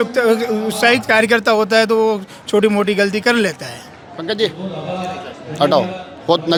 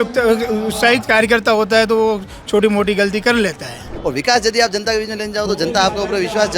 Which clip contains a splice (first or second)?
second